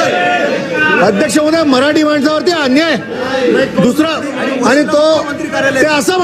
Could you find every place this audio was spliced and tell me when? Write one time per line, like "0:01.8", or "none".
none